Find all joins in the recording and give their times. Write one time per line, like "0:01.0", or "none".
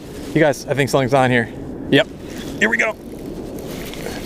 0:01.7